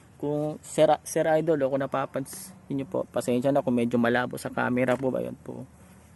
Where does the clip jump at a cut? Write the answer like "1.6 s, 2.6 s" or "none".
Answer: none